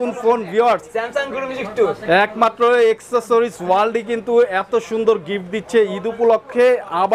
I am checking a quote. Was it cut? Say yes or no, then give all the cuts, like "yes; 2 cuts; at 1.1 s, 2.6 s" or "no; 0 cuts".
no; 0 cuts